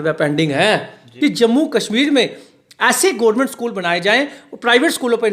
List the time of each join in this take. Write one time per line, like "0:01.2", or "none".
0:01.0